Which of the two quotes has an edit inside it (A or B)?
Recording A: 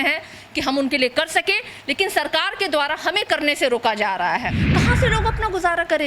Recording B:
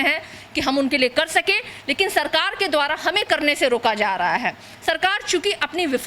A